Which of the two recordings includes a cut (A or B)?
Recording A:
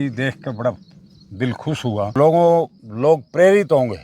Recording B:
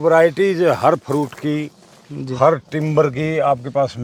A